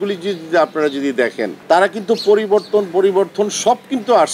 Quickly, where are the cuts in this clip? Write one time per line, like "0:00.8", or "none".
0:01.6